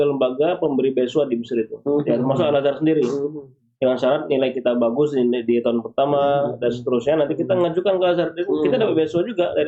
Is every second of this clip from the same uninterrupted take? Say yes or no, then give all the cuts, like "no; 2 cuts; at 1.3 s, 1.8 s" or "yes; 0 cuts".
yes; 0 cuts